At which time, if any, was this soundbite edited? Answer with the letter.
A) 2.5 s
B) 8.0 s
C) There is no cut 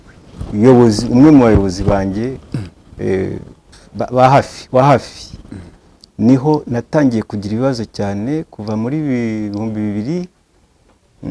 C